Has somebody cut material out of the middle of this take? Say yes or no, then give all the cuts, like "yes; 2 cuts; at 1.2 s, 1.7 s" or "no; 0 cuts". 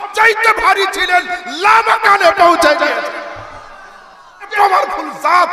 yes; 1 cut; at 4.5 s